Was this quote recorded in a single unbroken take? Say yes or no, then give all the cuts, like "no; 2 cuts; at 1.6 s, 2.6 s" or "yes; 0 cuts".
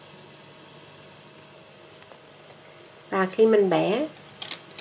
yes; 0 cuts